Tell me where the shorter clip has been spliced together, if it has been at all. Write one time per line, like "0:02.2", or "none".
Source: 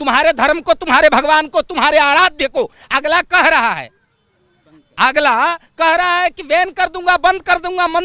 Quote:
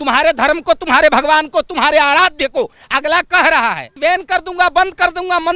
0:03.9